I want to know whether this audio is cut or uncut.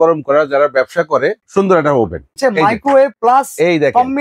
cut